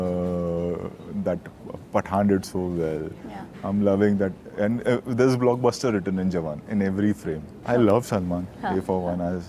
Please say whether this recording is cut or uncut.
cut